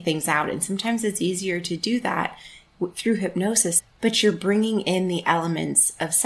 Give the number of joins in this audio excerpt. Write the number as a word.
one